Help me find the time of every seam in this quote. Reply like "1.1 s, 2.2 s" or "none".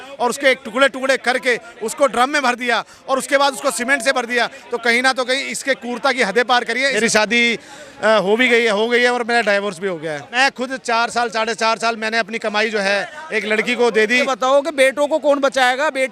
7.0 s, 10.3 s, 14.3 s